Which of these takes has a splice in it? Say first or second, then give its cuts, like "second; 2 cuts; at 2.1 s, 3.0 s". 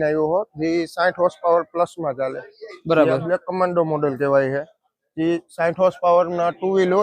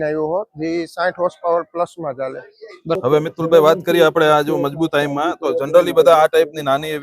second; 1 cut; at 3.0 s